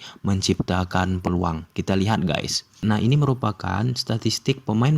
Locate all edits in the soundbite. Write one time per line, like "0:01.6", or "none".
0:02.6